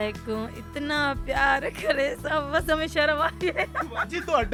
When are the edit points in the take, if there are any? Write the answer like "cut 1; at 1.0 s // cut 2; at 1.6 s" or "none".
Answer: none